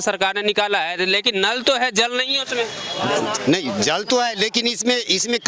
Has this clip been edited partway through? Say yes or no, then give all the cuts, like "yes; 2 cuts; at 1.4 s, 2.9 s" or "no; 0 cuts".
no; 0 cuts